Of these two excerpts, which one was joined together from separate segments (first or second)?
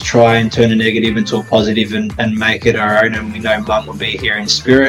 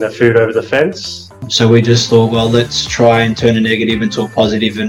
second